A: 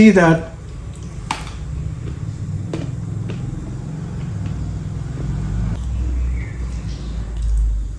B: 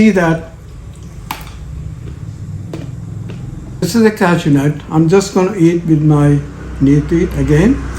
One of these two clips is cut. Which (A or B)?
B